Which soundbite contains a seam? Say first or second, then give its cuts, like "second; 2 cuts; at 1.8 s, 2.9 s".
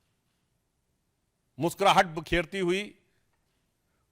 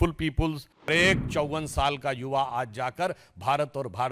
second; 1 cut; at 0.9 s